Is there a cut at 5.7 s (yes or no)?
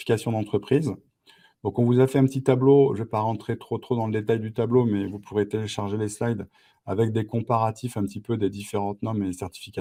no